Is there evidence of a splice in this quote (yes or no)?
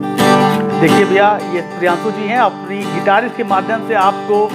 no